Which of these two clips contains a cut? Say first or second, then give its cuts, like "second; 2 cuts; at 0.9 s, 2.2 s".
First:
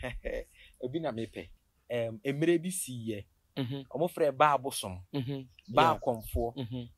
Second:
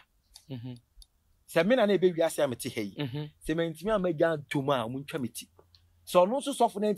first; 1 cut; at 1.6 s